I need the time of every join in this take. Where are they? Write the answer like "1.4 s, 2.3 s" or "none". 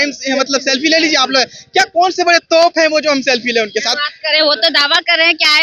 none

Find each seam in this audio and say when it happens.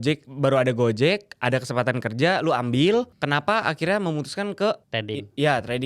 3.2 s, 4.9 s

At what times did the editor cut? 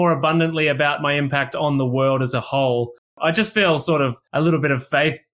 3.2 s, 4.2 s

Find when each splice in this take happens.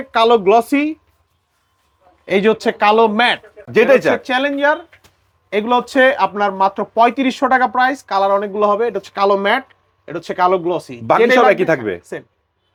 none

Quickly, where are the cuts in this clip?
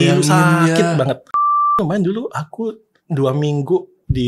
1.8 s

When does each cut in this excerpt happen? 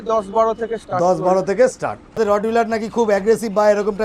1.6 s

